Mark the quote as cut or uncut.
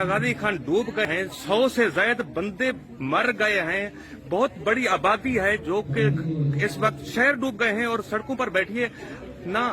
cut